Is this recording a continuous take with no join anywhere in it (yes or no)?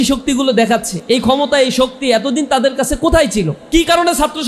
no